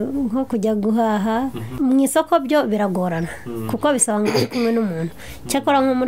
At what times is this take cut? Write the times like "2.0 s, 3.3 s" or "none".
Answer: 1.7 s